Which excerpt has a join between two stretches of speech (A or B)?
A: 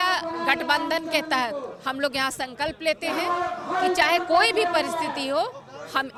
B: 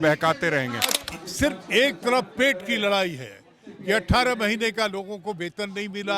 B